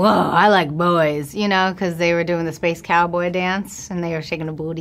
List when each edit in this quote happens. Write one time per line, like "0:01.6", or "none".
none